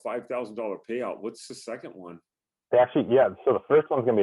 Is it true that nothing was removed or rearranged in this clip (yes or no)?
no